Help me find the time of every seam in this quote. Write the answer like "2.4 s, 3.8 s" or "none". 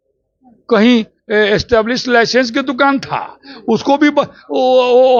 none